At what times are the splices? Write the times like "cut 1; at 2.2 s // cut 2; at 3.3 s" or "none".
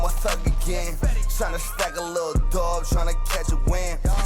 cut 1; at 2.9 s